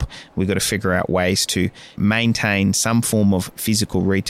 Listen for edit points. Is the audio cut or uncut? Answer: cut